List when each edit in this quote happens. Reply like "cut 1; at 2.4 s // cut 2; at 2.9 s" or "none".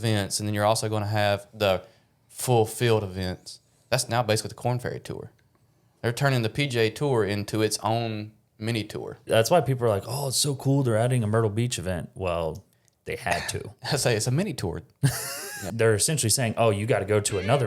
cut 1; at 9.2 s // cut 2; at 15.6 s